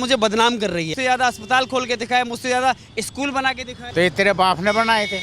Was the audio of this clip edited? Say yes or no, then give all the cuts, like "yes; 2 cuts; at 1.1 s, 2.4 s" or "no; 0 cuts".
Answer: yes; 2 cuts; at 0.9 s, 3.8 s